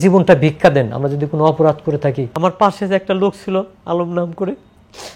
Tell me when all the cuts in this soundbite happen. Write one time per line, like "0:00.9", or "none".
0:02.3